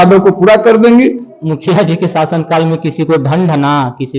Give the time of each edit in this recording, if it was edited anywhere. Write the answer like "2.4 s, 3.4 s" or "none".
1.3 s